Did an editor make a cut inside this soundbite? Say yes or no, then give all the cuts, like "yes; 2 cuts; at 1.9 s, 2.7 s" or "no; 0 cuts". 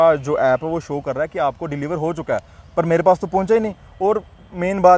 no; 0 cuts